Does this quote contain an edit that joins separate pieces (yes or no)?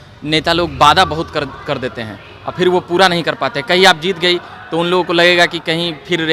no